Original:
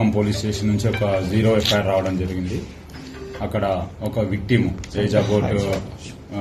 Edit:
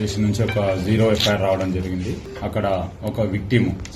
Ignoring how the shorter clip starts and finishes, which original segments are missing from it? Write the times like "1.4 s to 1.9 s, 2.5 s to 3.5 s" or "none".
2.7 s to 3.3 s